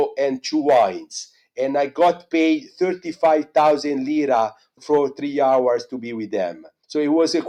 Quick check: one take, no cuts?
yes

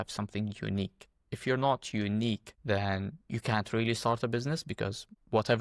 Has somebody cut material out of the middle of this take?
yes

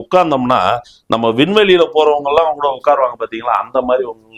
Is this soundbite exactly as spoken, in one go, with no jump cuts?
yes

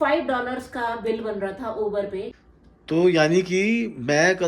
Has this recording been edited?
yes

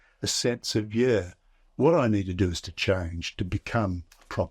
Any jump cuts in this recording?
no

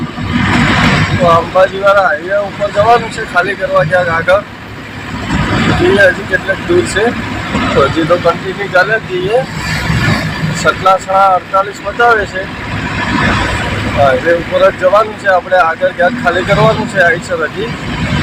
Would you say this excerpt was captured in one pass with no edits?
yes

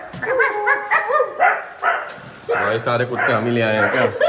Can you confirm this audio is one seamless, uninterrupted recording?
yes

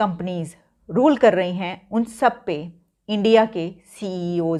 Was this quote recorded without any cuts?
yes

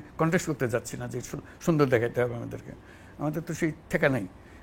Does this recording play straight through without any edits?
yes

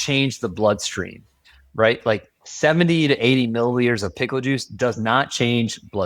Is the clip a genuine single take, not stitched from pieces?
yes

